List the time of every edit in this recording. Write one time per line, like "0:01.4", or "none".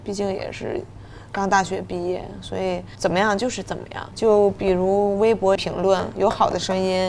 0:02.9
0:04.0
0:05.6